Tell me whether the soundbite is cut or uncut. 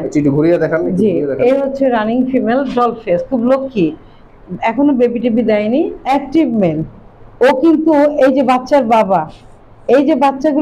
cut